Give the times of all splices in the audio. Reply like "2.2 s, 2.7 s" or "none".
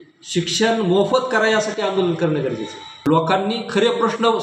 3.1 s